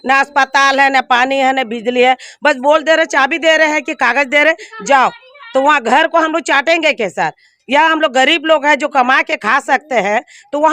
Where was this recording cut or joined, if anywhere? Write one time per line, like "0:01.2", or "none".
none